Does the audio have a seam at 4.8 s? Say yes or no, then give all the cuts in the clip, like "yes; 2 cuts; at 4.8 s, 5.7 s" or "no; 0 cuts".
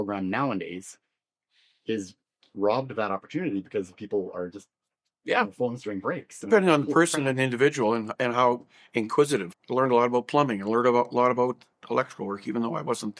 no; 1 cut; at 9.6 s